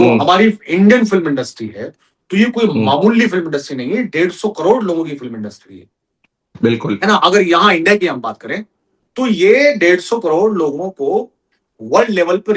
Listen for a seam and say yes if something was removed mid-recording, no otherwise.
no